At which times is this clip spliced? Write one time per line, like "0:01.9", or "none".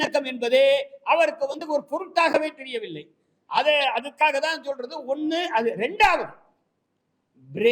none